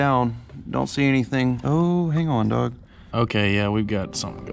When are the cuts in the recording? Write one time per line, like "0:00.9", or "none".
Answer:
0:03.1